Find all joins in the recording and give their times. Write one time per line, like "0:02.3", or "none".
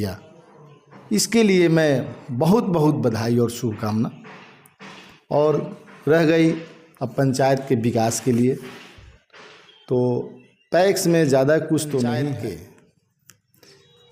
0:12.4